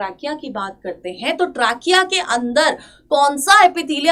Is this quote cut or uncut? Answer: uncut